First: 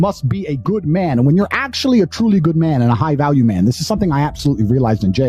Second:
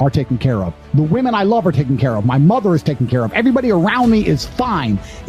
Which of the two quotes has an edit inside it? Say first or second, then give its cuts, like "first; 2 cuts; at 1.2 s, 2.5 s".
first; 1 cut; at 1.1 s